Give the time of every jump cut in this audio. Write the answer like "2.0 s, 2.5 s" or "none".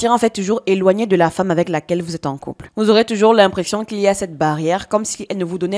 none